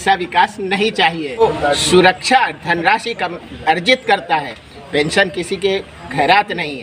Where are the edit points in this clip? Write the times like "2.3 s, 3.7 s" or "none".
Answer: 1.4 s